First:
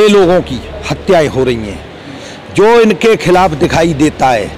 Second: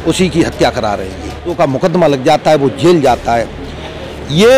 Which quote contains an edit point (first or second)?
second